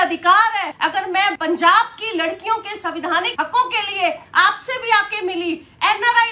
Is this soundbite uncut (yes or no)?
no